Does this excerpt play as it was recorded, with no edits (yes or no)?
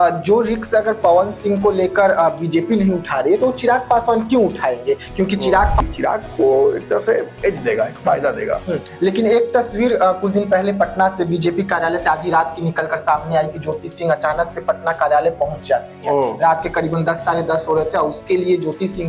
no